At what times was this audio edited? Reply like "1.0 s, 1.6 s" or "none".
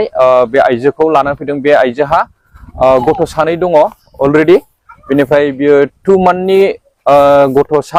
none